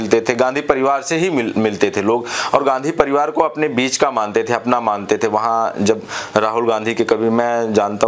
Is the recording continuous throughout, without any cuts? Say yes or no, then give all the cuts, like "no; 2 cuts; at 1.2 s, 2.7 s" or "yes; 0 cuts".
yes; 0 cuts